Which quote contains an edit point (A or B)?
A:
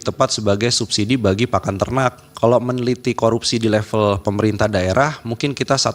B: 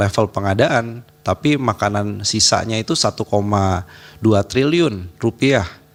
A